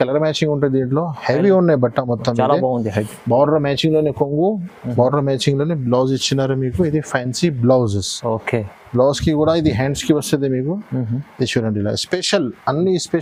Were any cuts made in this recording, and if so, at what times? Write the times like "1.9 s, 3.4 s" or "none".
none